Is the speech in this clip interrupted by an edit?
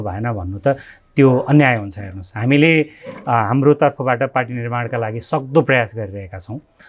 no; 0 cuts

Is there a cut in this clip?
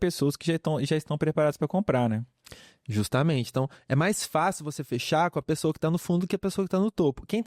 no; 0 cuts

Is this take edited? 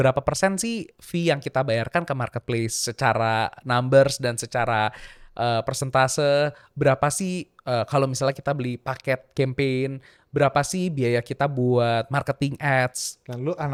no; 0 cuts

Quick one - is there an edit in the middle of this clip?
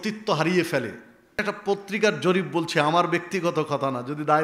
yes; 1 cut; at 1.4 s

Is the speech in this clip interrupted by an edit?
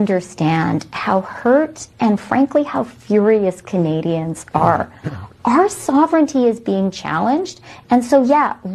no; 0 cuts

